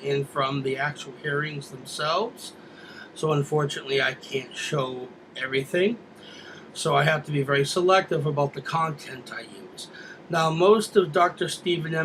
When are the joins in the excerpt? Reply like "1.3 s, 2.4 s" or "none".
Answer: 1.2 s

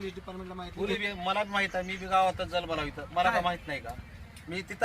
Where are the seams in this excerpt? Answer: 1.0 s

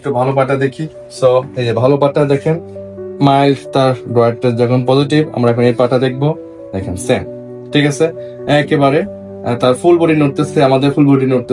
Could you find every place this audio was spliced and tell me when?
0.9 s

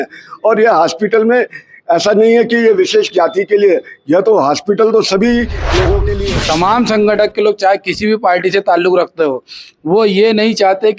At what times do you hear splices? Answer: 6.1 s

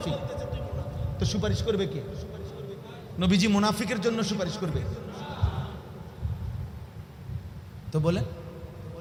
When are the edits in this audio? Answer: none

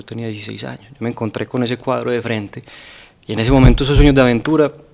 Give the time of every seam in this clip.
none

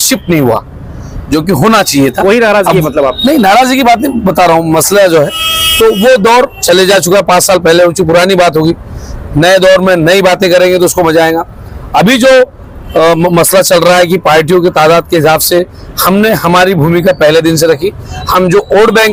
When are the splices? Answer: none

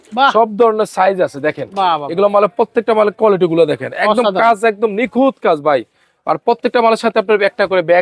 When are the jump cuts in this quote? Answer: none

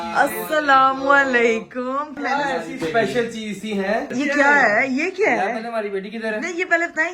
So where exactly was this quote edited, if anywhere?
2.2 s, 4.1 s

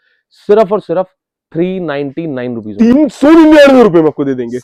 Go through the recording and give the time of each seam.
none

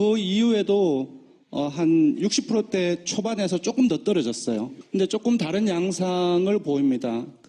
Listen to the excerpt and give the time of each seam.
none

